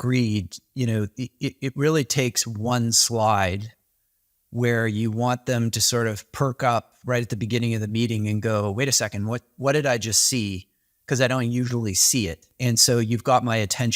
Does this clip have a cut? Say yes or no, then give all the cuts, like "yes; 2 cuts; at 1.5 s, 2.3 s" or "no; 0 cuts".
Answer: yes; 1 cut; at 12.5 s